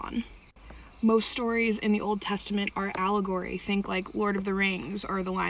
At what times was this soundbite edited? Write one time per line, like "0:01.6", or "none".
0:02.3
0:03.8